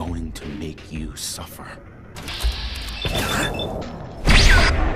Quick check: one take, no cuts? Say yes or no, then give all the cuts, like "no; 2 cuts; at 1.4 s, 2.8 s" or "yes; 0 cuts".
no; 2 cuts; at 2.2 s, 3.8 s